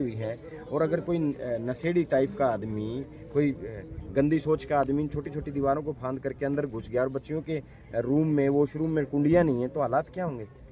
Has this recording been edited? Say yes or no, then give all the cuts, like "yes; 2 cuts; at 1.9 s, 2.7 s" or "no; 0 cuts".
no; 0 cuts